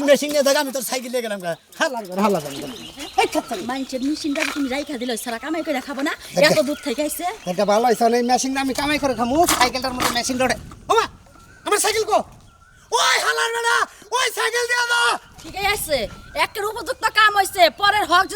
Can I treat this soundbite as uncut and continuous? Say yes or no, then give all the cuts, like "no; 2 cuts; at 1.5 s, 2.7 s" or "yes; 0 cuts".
yes; 0 cuts